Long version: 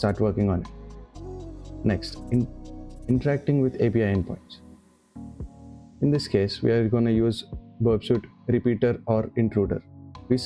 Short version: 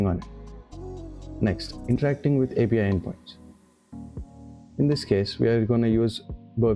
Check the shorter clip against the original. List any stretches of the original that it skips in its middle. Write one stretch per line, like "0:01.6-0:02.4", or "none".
0:02.4-0:03.2